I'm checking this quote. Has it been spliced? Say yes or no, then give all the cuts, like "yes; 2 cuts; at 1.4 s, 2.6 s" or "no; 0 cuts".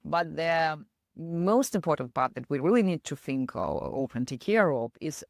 no; 0 cuts